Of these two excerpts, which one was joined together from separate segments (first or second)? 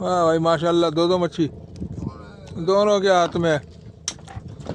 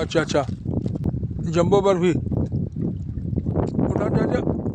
second